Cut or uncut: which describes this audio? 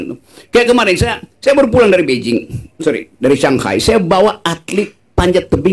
uncut